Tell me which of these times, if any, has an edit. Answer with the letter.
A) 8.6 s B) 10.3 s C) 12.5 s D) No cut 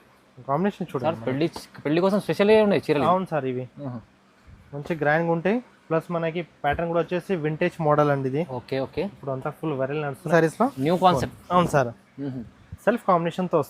B